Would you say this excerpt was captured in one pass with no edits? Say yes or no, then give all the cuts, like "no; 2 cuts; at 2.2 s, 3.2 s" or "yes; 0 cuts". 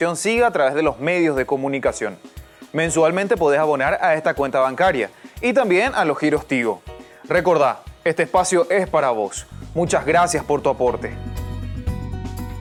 yes; 0 cuts